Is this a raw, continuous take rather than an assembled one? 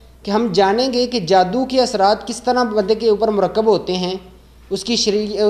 yes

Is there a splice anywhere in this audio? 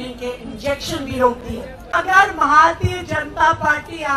yes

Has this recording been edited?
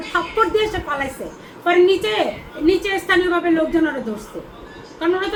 no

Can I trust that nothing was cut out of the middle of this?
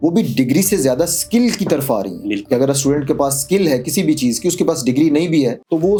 yes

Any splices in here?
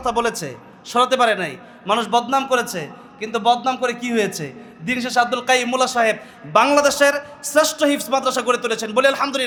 no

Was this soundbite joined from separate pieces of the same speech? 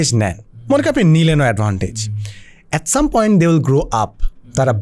no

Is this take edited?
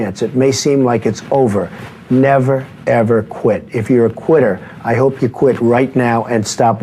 no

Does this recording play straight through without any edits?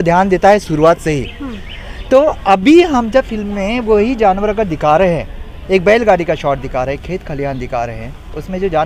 yes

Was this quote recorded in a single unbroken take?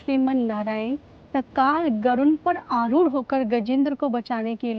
yes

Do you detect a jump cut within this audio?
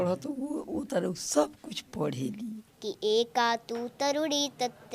yes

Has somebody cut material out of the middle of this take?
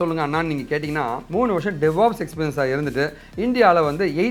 no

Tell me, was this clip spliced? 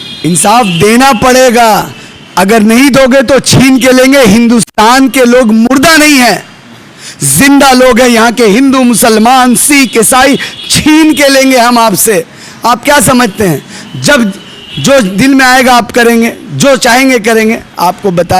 no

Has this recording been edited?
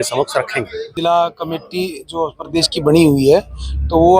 yes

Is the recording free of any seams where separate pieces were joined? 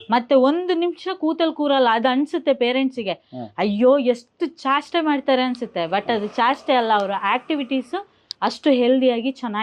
yes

